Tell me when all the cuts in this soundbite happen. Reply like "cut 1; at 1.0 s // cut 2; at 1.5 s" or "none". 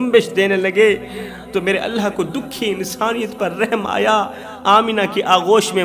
none